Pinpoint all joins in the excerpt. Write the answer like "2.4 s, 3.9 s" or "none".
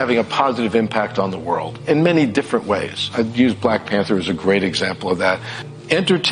1.7 s